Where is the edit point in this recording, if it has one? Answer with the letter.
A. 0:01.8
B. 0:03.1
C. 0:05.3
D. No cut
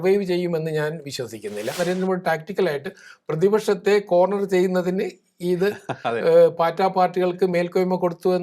A